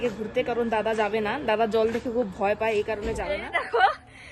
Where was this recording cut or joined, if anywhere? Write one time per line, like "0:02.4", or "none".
0:03.2